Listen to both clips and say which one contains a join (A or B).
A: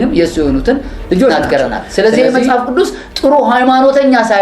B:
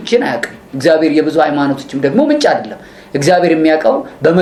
A